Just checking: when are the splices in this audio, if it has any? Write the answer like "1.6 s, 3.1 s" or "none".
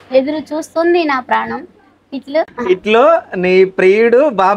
2.6 s

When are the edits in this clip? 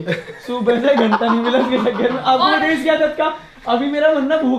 none

